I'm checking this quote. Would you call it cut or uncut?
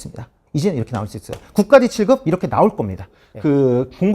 cut